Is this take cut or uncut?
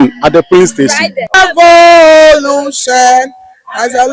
cut